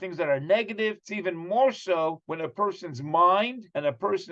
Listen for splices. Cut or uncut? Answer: uncut